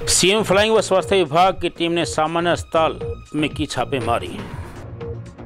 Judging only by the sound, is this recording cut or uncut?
uncut